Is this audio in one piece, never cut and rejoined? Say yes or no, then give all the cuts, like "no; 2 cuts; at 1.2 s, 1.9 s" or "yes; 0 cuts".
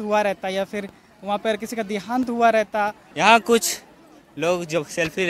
no; 1 cut; at 3.0 s